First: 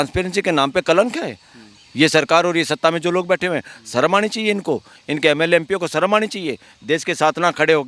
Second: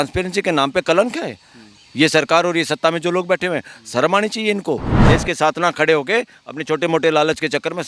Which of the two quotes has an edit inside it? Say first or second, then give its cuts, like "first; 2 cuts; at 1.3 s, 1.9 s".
second; 1 cut; at 4.9 s